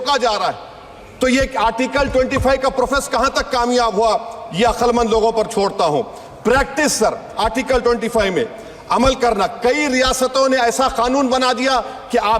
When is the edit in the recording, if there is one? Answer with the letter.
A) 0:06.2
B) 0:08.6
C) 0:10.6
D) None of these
D